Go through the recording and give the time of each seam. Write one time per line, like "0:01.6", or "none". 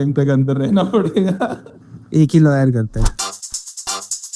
none